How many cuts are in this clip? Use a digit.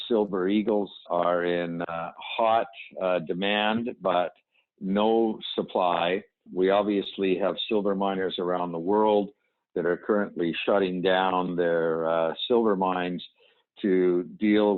2